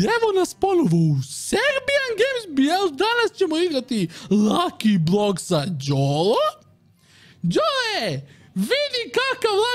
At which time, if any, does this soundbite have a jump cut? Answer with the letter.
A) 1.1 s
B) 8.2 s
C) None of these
C